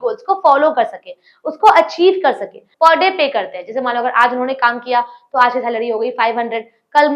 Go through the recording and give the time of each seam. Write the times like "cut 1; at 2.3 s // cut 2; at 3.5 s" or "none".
cut 1; at 2.6 s

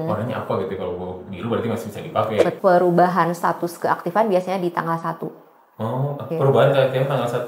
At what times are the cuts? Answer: cut 1; at 2.5 s

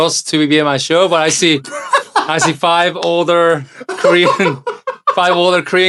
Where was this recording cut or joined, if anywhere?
none

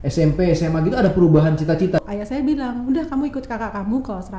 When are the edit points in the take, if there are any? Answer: cut 1; at 2.0 s

